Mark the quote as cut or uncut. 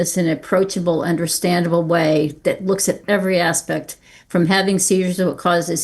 uncut